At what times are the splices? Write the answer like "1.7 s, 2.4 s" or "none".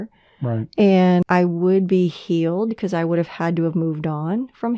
1.2 s